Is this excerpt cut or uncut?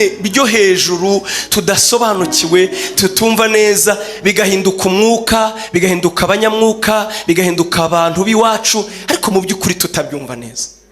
uncut